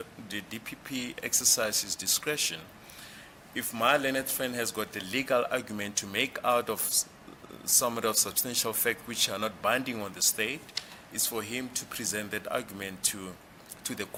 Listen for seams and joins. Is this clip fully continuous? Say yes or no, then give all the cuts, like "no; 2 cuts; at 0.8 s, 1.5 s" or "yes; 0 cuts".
yes; 0 cuts